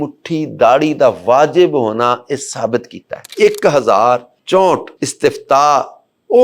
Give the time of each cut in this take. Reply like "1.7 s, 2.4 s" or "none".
3.3 s, 4.3 s, 5.0 s